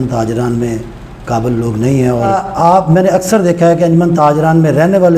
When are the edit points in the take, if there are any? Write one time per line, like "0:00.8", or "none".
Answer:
0:02.3